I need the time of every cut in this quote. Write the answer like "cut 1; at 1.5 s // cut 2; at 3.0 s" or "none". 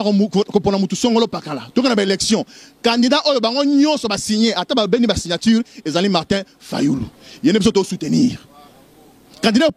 none